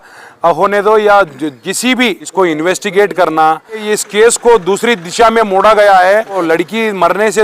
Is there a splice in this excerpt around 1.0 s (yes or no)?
no